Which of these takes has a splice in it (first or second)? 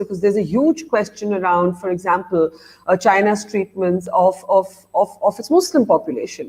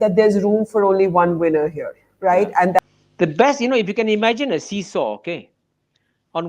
second